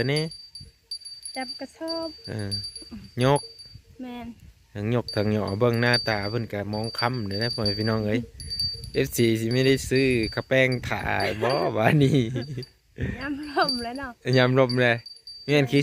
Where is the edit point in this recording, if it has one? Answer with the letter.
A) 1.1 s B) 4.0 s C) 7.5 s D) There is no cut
D